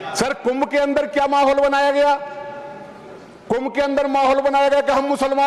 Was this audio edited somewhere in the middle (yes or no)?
no